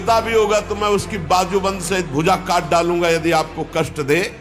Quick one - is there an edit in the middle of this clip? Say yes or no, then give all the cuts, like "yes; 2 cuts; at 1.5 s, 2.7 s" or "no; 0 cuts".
no; 0 cuts